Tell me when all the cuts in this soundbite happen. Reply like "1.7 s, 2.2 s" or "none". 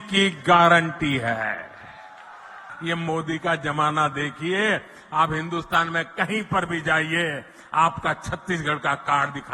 2.7 s